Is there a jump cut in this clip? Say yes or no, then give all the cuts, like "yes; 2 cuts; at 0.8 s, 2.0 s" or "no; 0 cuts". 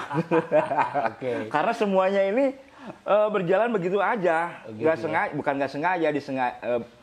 no; 0 cuts